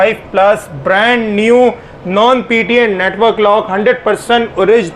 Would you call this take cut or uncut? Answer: uncut